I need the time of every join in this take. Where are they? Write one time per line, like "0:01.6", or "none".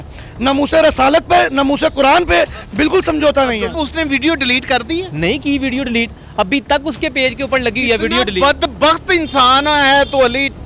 0:03.8